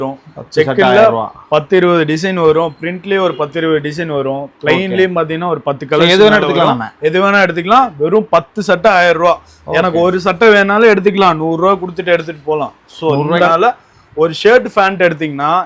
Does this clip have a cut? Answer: yes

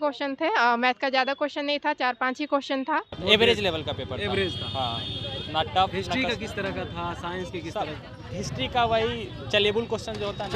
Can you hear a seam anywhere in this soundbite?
yes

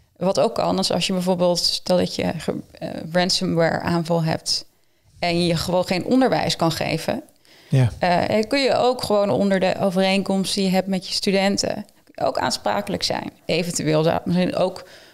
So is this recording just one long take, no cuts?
no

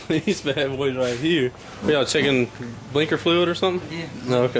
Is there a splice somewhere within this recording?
yes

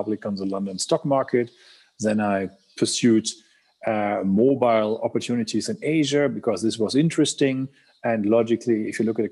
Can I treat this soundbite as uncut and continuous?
yes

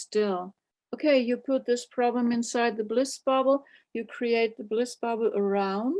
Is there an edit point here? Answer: no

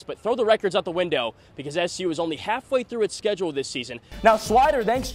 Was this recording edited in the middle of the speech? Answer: yes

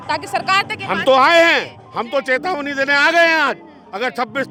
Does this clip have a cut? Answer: no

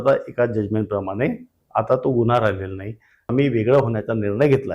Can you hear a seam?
yes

